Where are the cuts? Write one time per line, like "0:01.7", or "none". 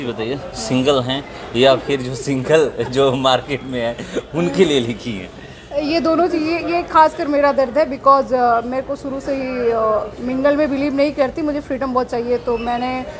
none